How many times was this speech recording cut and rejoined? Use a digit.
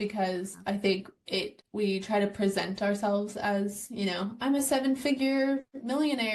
1